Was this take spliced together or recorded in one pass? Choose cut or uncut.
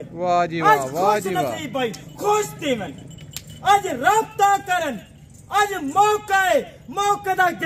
uncut